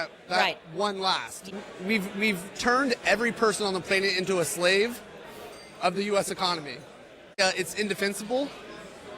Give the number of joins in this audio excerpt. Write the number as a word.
two